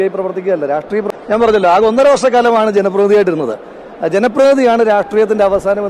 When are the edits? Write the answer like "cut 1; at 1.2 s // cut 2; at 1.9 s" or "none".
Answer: cut 1; at 1.1 s